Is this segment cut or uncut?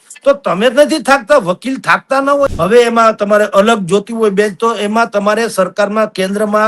cut